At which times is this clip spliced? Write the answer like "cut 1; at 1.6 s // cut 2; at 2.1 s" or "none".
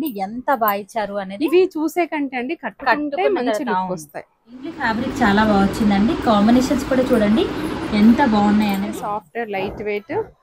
cut 1; at 4.9 s // cut 2; at 8.9 s